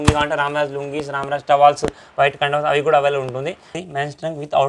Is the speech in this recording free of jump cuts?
no; 1 cut; at 3.7 s

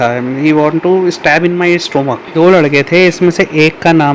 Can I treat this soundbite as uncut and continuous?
no; 1 cut; at 2.3 s

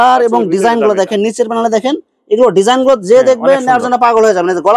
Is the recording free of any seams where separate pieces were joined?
yes; 0 cuts

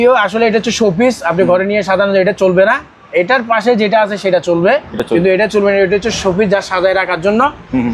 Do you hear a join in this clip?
no; 0 cuts

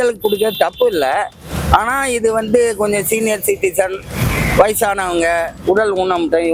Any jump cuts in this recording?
no; 0 cuts

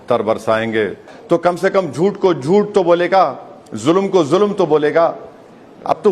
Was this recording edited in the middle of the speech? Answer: yes; 1 cut; at 1.1 s

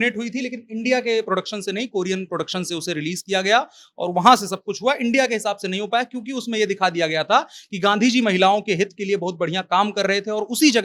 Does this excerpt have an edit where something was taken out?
no; 0 cuts

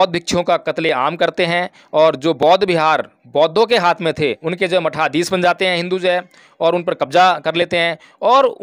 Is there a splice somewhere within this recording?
yes; 1 cut; at 4.4 s

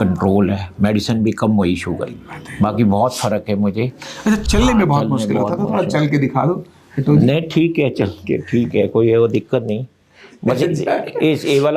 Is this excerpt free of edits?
no; 2 cuts; at 2.4 s, 4.4 s

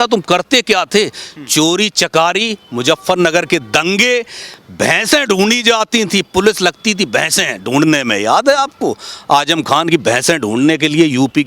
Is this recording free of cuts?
yes; 0 cuts

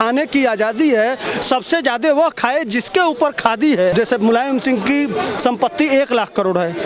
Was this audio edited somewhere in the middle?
yes; 1 cut; at 3.9 s

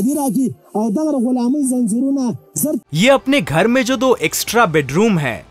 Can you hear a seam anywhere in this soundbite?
yes; 1 cut; at 2.8 s

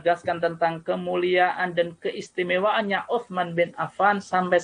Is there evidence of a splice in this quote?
no; 0 cuts

